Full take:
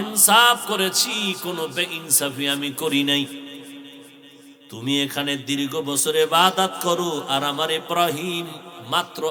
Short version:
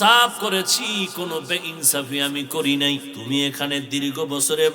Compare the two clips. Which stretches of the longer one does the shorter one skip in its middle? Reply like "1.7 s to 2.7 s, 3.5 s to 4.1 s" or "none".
3.4 s to 4.7 s